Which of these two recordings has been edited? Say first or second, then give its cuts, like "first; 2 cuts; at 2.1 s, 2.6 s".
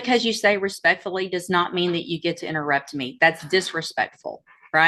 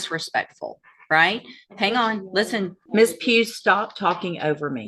second; 1 cut; at 2.8 s